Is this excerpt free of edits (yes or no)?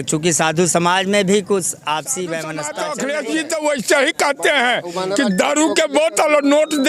no